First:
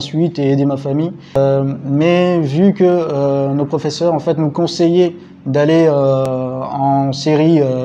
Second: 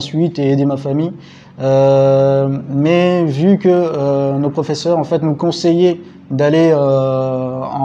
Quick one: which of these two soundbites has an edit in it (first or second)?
first